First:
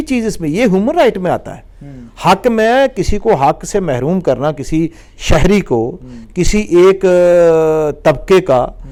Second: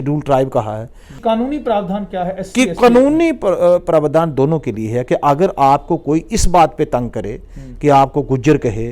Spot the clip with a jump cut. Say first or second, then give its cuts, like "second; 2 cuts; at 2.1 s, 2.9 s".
second; 1 cut; at 1.1 s